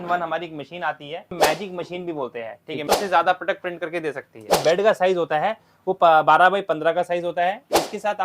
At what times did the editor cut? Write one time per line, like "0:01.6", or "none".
0:01.3
0:02.8
0:04.6

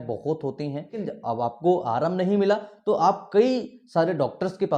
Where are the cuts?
0:01.0

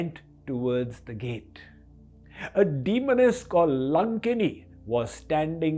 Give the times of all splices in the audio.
none

